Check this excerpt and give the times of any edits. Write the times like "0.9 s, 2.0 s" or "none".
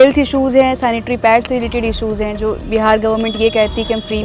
none

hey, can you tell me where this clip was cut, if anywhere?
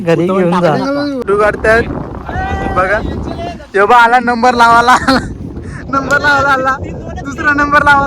1.2 s

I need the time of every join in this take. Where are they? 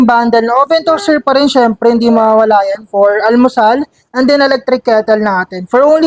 none

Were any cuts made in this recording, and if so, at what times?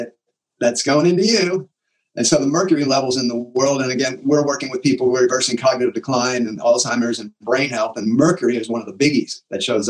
none

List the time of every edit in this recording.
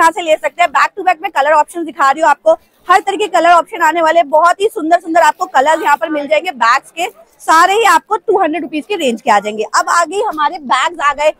none

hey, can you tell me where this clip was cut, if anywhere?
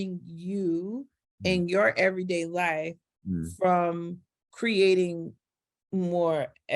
none

